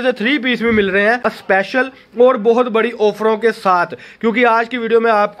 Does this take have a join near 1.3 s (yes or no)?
yes